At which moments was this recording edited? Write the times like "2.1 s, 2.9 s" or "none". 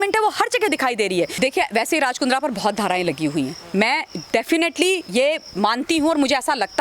1.3 s